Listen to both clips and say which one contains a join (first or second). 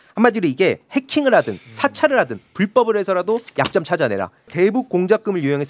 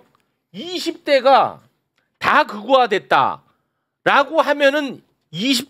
first